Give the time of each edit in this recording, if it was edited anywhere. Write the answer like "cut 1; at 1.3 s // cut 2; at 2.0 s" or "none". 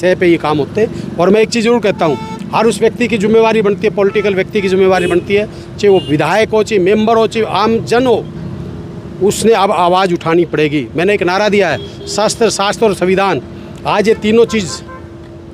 none